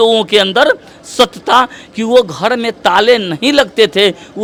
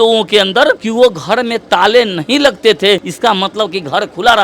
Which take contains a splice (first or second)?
second